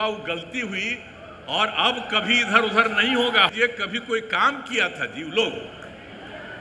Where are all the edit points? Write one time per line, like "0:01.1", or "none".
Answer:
0:03.5